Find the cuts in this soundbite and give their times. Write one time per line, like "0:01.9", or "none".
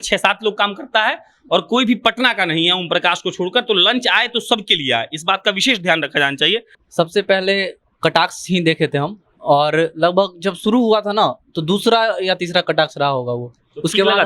0:06.8